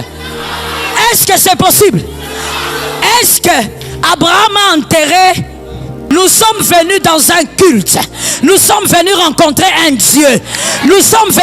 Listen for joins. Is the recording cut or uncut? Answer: cut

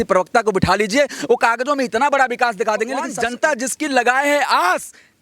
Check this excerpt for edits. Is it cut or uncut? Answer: cut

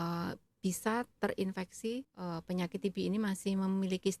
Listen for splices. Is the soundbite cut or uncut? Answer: cut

